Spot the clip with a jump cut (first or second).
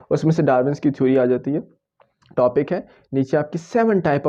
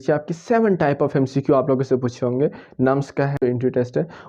second